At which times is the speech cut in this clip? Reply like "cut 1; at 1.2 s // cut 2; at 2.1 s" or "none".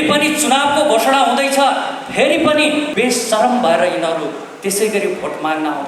cut 1; at 2.9 s